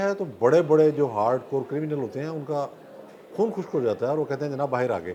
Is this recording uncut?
yes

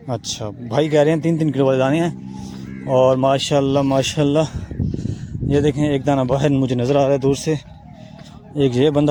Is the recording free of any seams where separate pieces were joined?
yes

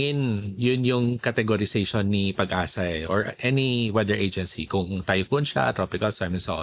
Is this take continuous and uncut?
yes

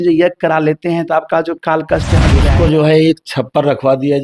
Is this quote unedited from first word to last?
no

